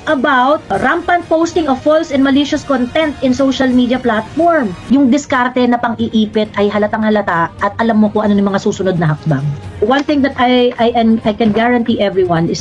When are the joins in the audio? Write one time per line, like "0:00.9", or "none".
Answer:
0:04.8